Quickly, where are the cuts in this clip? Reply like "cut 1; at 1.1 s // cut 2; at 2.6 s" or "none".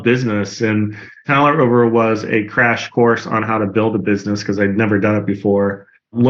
cut 1; at 1.3 s